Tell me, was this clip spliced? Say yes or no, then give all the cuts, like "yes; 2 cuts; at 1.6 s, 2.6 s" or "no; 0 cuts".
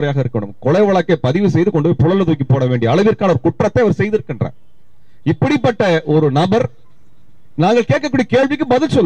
no; 0 cuts